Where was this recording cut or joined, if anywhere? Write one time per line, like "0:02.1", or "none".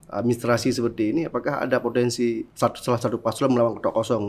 0:02.5